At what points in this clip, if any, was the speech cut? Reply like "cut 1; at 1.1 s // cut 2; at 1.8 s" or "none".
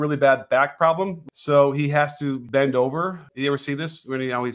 cut 1; at 1.2 s // cut 2; at 2.4 s // cut 3; at 3.2 s